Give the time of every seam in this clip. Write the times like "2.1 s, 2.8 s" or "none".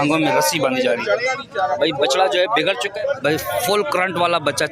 2.9 s